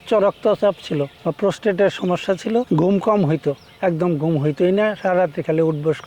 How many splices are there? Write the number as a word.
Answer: two